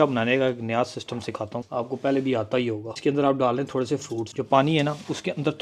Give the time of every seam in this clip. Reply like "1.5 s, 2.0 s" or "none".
none